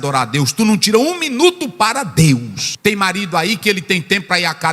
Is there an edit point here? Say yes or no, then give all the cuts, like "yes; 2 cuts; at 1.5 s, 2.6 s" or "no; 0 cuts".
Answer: yes; 1 cut; at 2.6 s